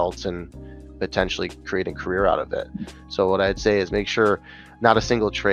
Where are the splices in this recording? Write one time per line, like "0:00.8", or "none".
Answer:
none